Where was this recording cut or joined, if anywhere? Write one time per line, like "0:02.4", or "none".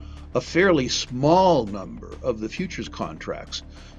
none